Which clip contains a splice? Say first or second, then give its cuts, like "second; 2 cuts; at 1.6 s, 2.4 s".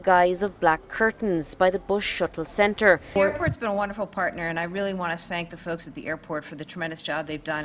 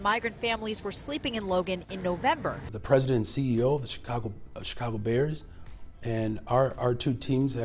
first; 1 cut; at 3.1 s